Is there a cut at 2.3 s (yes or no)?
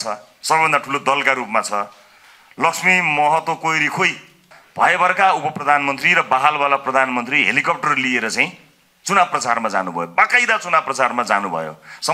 no